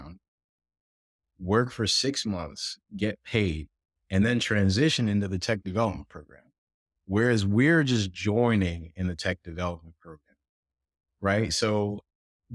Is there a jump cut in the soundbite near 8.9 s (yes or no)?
no